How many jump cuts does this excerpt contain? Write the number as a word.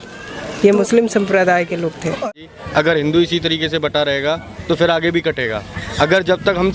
one